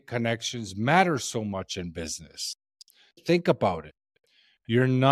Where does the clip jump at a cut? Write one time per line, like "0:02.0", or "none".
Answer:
0:03.2